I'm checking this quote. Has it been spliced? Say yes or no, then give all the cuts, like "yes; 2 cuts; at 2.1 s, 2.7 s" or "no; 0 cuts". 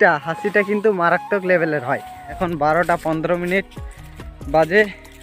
yes; 1 cut; at 2.3 s